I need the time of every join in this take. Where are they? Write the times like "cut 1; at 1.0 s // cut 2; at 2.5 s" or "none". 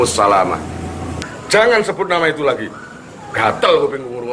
cut 1; at 1.2 s